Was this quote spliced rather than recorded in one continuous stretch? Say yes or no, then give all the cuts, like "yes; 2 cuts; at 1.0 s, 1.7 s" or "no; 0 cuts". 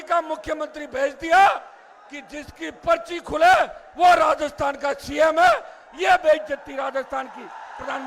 no; 0 cuts